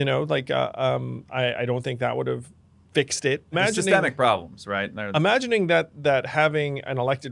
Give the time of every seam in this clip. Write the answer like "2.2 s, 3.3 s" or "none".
3.5 s, 5.0 s